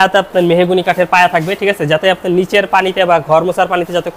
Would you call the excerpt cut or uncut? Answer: uncut